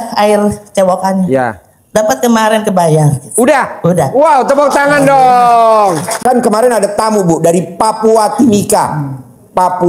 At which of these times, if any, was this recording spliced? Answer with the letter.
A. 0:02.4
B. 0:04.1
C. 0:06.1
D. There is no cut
C